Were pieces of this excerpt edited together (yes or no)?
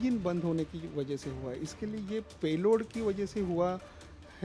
no